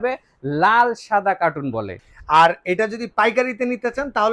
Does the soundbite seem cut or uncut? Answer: cut